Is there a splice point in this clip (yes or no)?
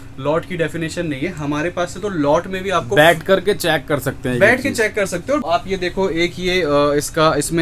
yes